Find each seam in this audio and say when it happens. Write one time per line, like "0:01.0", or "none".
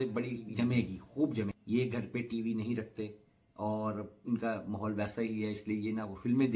0:01.6